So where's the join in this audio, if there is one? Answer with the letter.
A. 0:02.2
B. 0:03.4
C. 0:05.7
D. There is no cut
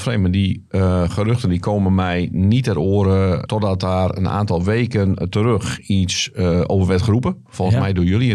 B